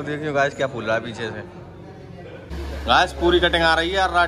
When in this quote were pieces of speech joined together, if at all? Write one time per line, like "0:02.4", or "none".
0:02.5